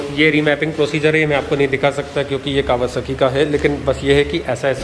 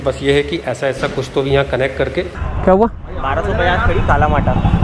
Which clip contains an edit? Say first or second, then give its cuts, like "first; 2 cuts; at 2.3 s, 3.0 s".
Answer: second; 1 cut; at 2.4 s